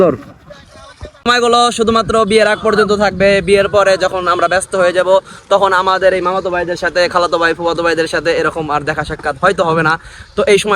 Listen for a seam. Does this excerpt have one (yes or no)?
yes